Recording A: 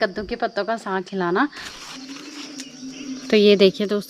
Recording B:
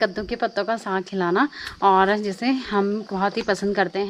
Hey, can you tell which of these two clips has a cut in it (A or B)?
A